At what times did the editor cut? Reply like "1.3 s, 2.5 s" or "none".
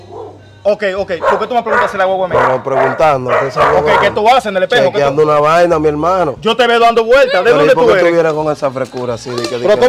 none